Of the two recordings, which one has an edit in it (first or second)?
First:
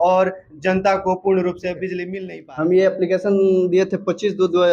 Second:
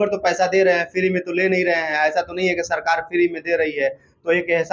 first